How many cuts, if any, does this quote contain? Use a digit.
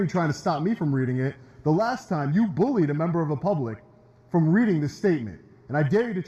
0